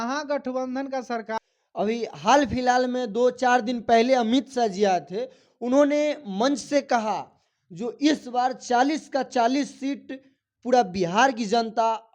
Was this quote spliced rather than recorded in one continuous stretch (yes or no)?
no